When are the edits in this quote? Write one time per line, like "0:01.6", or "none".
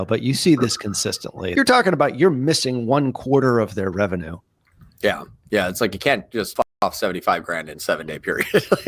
0:01.4
0:06.8